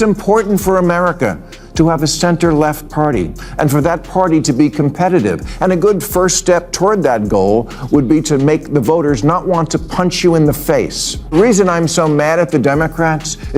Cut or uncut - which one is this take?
cut